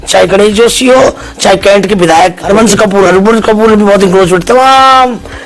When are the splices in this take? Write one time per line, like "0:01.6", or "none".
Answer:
0:02.4

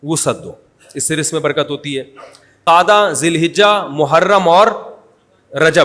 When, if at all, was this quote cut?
0:02.7

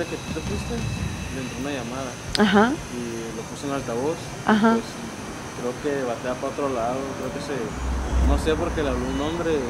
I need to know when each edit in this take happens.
none

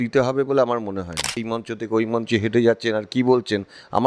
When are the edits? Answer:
0:01.6

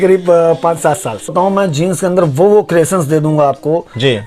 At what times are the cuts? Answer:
0:01.3

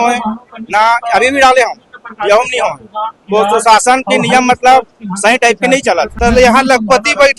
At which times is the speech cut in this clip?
0:06.1

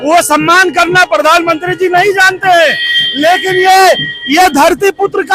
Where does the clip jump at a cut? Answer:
none

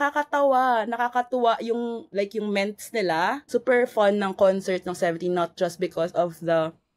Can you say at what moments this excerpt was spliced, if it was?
0:03.4

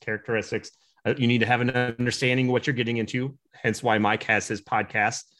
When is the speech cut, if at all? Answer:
none

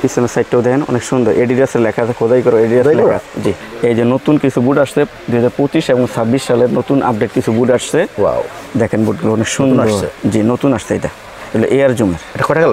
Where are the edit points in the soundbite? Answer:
0:03.6

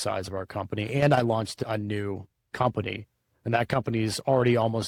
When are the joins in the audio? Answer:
none

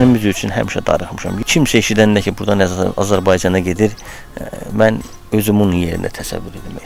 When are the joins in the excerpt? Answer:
0:01.2

